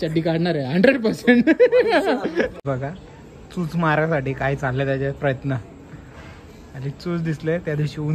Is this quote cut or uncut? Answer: cut